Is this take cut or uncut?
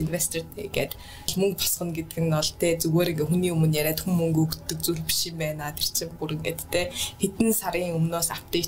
cut